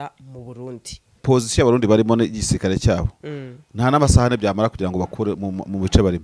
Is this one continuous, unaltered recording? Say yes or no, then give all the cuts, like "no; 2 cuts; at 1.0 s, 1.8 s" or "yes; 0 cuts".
no; 1 cut; at 1.2 s